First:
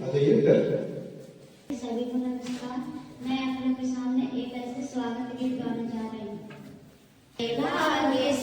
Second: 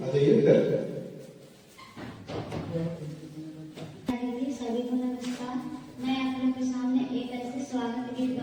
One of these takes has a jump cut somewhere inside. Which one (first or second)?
first